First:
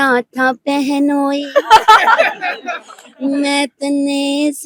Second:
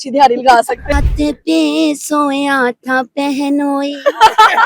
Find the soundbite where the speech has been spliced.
second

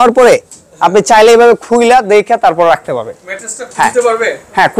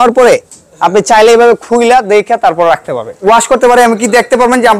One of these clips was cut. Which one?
second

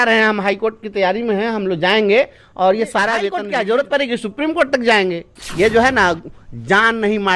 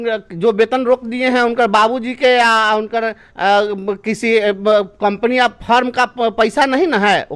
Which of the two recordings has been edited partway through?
first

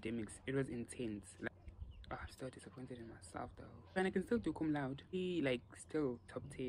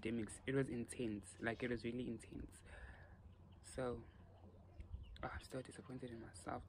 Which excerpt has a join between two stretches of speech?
first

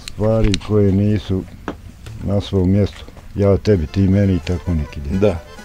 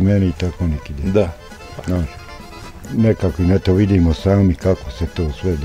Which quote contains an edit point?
second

